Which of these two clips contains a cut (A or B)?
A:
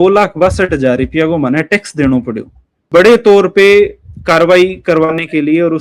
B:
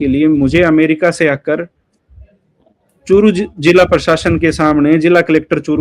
A